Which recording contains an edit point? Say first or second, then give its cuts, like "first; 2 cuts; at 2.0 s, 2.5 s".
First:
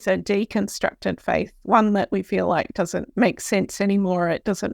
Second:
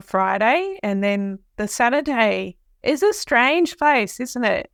first; 1 cut; at 3.0 s